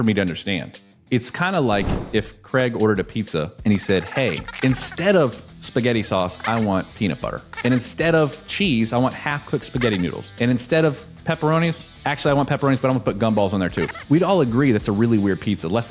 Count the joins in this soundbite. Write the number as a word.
one